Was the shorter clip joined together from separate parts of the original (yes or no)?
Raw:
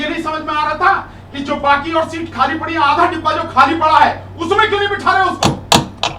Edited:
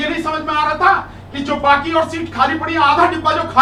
no